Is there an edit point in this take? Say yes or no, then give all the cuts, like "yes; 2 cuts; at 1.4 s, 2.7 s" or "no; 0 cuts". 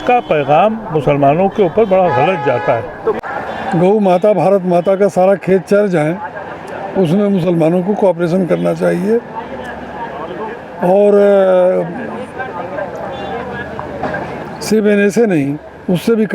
yes; 1 cut; at 3.2 s